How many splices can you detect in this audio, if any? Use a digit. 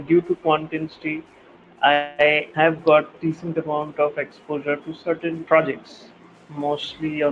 2